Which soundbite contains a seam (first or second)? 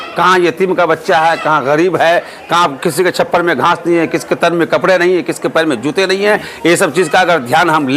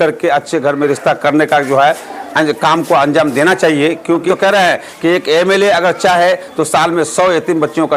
second